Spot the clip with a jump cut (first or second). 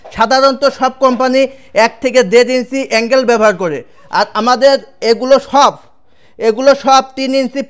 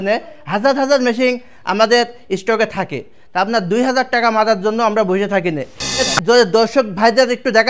second